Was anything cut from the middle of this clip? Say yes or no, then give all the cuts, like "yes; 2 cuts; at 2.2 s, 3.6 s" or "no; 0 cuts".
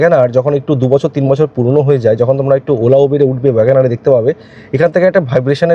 no; 0 cuts